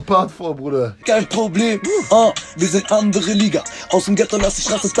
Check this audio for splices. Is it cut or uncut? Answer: cut